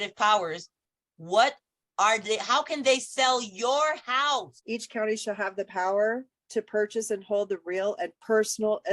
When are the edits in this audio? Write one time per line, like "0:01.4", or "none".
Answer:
0:04.5